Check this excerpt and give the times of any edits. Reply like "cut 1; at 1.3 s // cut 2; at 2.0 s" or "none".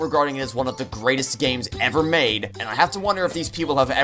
cut 1; at 2.5 s